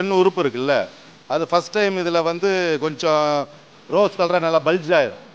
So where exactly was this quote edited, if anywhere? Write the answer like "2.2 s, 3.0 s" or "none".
none